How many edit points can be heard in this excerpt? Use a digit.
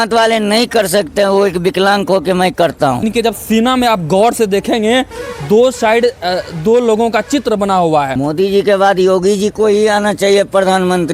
2